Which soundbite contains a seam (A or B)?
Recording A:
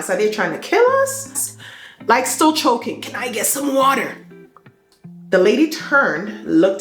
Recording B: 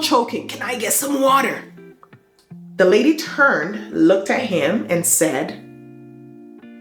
A